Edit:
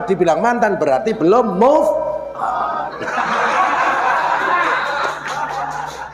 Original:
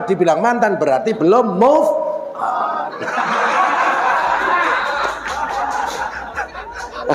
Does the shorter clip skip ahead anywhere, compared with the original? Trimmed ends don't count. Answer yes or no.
no